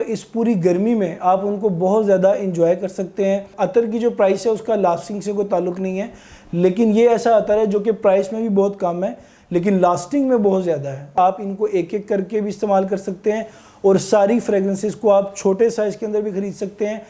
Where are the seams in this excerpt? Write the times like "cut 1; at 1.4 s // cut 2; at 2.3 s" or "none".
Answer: cut 1; at 3.5 s // cut 2; at 11.1 s